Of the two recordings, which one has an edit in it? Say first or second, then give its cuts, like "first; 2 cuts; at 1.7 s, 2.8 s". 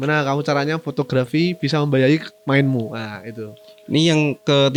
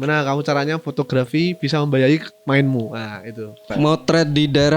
second; 1 cut; at 3.6 s